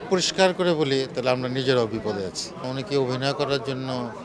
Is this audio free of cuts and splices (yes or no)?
no